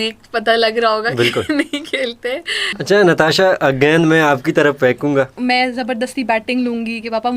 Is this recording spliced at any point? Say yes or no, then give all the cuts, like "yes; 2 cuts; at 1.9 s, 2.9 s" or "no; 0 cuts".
yes; 2 cuts; at 2.8 s, 5.3 s